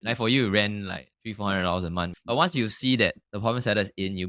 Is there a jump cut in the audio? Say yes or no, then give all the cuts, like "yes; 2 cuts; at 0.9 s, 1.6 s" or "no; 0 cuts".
yes; 2 cuts; at 1.1 s, 2.1 s